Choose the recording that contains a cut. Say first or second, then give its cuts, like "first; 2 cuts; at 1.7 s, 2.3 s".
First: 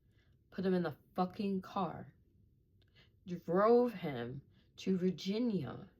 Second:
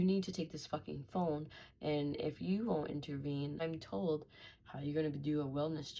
second; 1 cut; at 3.6 s